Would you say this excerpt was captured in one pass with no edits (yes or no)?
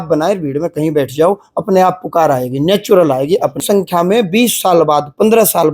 no